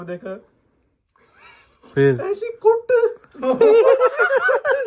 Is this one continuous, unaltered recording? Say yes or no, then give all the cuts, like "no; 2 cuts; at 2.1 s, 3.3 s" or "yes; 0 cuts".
yes; 0 cuts